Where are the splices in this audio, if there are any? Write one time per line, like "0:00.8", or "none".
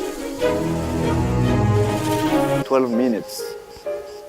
none